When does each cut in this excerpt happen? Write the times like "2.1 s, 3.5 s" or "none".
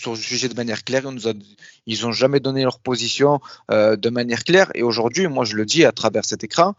none